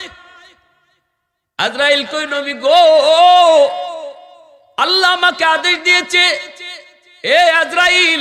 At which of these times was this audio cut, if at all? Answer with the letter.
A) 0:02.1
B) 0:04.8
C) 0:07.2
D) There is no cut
D